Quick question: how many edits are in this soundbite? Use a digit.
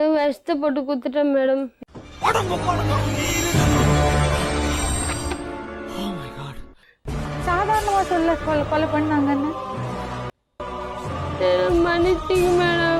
0